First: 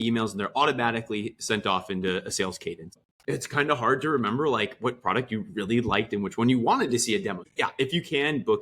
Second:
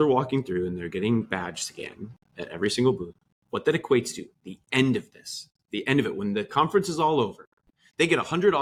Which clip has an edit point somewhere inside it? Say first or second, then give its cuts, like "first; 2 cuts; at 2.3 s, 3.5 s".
first; 2 cuts; at 3.1 s, 7.4 s